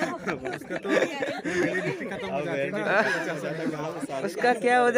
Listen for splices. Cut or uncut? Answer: uncut